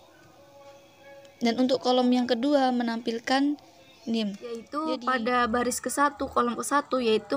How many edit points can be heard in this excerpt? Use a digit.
1